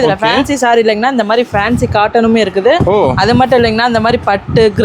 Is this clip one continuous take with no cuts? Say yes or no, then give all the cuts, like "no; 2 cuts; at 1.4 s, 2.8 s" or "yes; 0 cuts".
yes; 0 cuts